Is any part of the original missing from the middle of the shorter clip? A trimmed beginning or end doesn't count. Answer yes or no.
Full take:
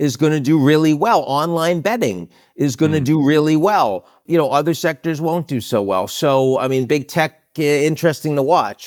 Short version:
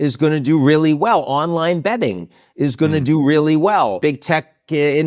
yes